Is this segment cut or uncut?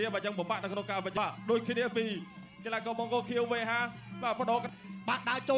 cut